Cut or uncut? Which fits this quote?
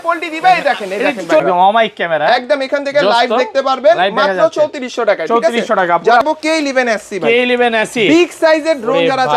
cut